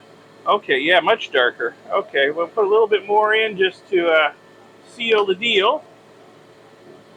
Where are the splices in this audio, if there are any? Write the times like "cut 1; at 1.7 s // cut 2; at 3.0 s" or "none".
none

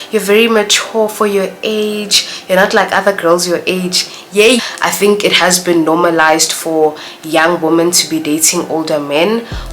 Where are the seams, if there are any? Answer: cut 1; at 4.6 s

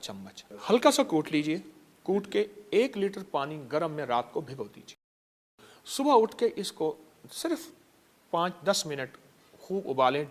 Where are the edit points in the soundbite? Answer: none

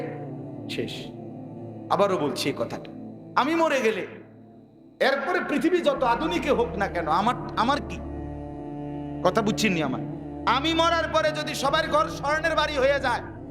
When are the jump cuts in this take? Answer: cut 1; at 7.9 s // cut 2; at 9.2 s

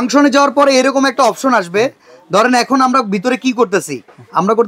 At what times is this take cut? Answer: none

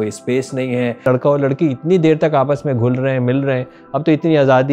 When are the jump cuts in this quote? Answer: cut 1; at 1.0 s

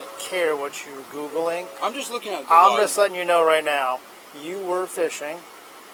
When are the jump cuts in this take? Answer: none

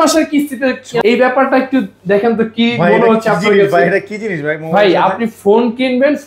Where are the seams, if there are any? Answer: cut 1; at 1.0 s

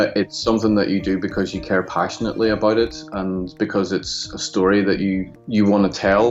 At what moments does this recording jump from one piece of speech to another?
cut 1; at 5.3 s

